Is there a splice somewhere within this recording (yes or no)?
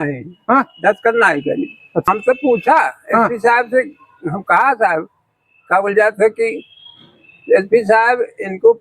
yes